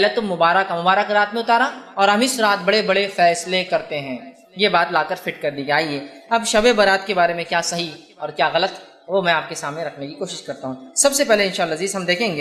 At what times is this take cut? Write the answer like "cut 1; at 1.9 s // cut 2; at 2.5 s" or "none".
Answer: none